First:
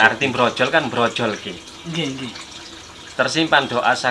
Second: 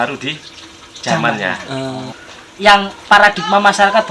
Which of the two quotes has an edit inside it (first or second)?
second